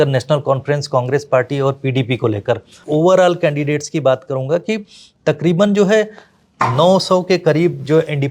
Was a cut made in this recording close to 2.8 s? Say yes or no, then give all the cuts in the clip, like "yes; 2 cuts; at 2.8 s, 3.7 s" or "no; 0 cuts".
yes; 1 cut; at 2.8 s